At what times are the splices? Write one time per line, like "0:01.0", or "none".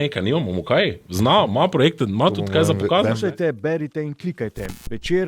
0:03.2